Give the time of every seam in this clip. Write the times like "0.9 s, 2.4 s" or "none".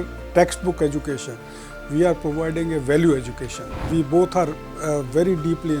3.9 s